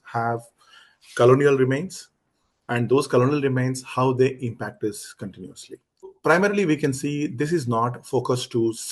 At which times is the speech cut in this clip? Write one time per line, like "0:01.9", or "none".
0:06.1